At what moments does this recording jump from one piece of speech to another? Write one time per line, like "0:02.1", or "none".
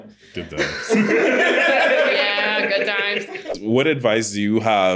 0:03.5